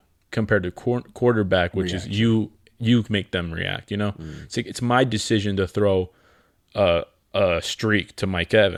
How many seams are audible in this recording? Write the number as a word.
zero